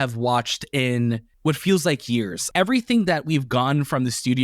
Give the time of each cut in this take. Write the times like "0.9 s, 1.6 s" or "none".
1.3 s, 2.4 s